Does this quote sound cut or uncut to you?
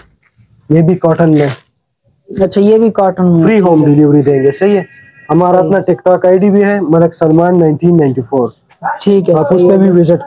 uncut